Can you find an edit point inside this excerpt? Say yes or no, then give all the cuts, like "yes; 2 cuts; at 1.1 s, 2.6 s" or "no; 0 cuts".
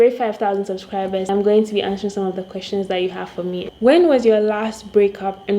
yes; 2 cuts; at 1.3 s, 3.6 s